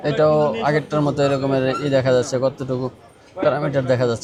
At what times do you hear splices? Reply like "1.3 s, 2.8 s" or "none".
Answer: none